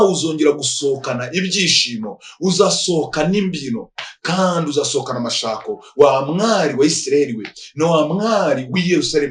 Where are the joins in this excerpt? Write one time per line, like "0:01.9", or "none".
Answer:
none